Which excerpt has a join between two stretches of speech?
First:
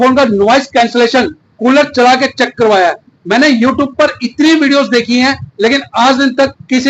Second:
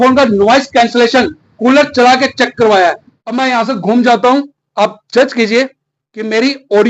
second; 1 cut; at 3.1 s

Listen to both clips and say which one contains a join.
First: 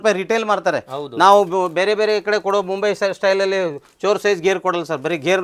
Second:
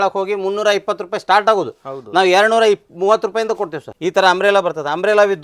second; 1 cut; at 3.9 s

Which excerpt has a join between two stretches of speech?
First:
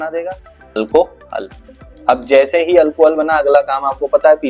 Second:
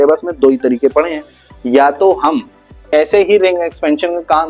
second; 1 cut; at 2.9 s

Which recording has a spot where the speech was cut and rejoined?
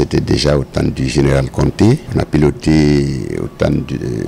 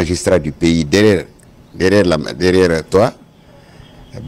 first; 1 cut; at 2.1 s

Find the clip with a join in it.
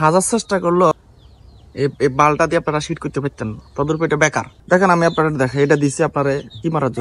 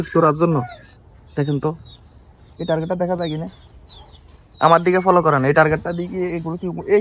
first; 2 cuts; at 0.9 s, 4.5 s

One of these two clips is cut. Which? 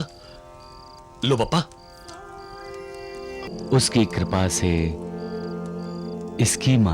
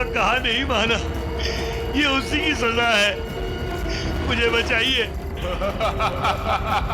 first; 1 cut; at 3.5 s

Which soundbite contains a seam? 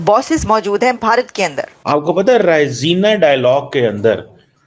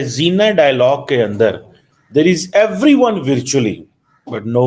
first; 1 cut; at 1.7 s

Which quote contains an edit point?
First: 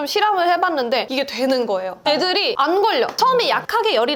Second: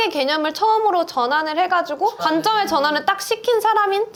first; 2 cuts; at 1.1 s, 2.0 s

